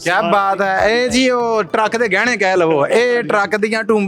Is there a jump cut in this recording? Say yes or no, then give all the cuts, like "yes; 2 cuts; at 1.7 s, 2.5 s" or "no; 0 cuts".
no; 0 cuts